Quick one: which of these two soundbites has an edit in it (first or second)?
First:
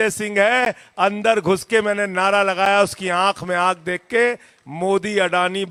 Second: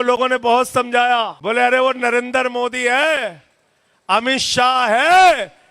second